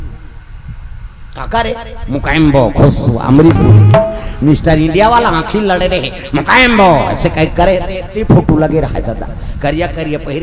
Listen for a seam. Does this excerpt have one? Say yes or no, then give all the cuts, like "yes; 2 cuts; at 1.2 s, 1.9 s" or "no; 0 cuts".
no; 0 cuts